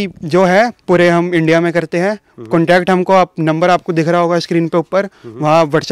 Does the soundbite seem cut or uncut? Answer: uncut